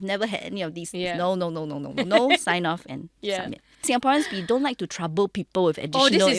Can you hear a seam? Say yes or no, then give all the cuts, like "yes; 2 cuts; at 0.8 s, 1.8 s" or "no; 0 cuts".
yes; 1 cut; at 3.8 s